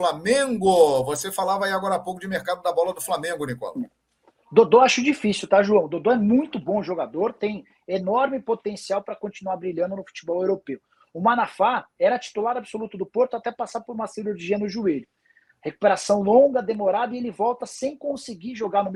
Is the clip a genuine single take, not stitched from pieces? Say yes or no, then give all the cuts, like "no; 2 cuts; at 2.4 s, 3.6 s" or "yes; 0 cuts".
yes; 0 cuts